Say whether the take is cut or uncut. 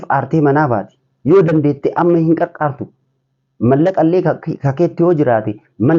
uncut